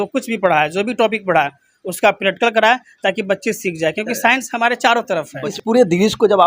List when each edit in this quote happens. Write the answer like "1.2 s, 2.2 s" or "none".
5.5 s